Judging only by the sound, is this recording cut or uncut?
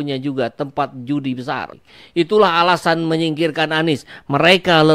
cut